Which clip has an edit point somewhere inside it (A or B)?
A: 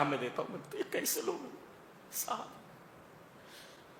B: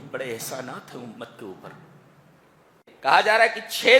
B